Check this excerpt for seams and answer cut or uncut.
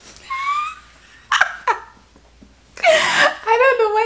uncut